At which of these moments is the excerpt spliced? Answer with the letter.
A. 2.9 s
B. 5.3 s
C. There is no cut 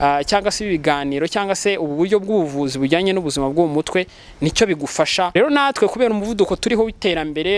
B